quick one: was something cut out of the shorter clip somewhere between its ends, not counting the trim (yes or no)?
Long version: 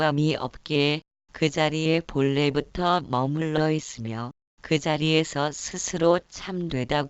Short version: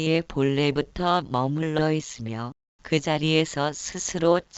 no